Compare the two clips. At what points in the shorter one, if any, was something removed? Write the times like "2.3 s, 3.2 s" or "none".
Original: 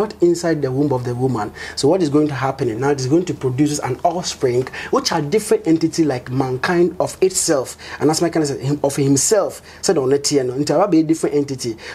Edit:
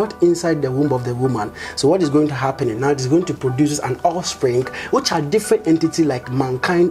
none